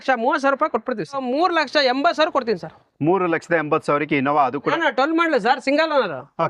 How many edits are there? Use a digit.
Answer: 2